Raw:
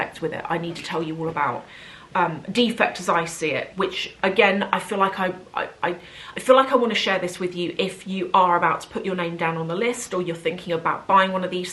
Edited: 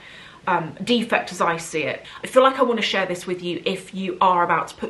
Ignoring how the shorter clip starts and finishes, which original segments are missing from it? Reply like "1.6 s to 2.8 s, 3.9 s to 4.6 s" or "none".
3.7 s to 6.1 s